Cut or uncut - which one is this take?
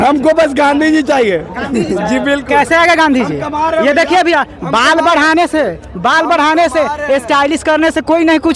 uncut